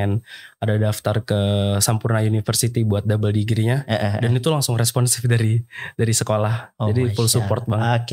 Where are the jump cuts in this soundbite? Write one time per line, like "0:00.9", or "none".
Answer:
none

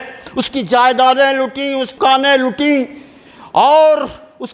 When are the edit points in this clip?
0:01.9

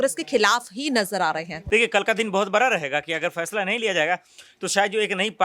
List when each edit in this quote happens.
0:01.6

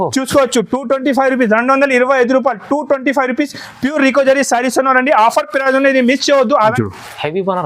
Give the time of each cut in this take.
0:06.7

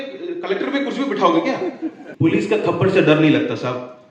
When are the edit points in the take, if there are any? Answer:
0:02.0

